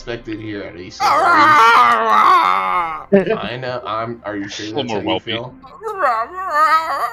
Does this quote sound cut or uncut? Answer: uncut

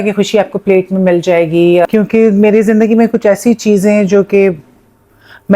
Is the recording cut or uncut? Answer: cut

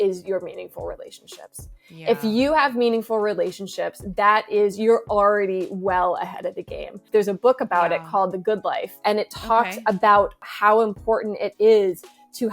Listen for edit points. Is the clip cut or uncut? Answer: cut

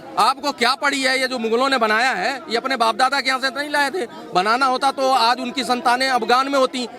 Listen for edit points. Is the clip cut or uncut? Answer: uncut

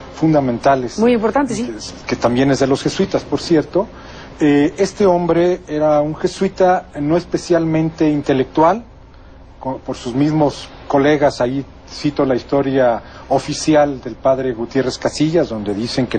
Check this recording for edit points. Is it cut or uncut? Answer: cut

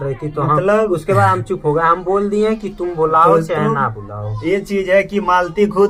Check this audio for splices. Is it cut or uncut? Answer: uncut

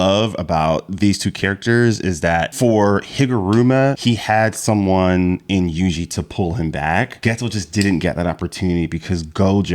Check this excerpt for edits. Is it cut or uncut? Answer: cut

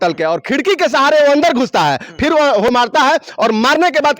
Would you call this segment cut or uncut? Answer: cut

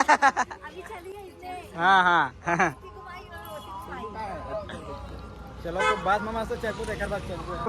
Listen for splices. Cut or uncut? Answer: uncut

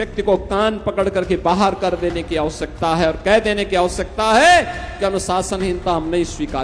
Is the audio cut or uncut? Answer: uncut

